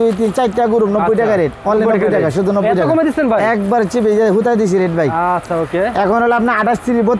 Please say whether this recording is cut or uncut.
uncut